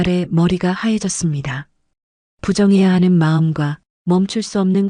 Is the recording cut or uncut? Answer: uncut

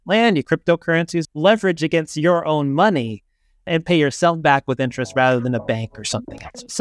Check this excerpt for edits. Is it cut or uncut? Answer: cut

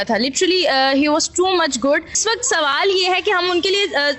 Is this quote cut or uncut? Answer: uncut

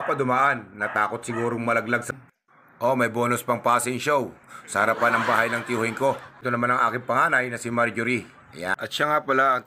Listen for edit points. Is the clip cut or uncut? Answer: cut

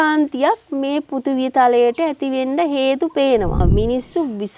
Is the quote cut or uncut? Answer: cut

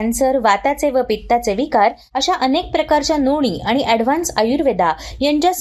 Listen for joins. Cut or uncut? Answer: uncut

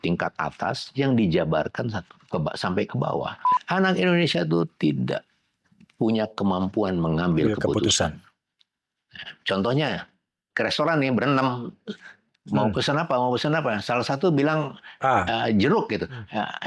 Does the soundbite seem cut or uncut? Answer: cut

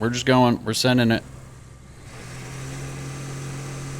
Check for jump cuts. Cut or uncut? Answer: cut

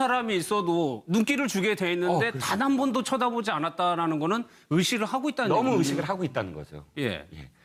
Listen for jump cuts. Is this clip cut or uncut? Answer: uncut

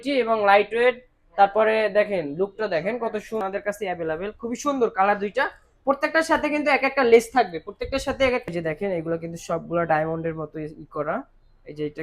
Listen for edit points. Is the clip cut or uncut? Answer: cut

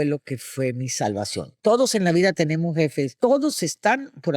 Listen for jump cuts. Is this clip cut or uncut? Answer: cut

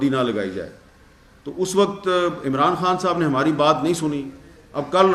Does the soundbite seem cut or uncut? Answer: uncut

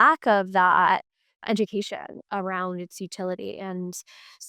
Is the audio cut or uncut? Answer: uncut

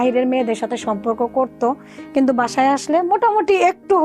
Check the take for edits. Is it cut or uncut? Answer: uncut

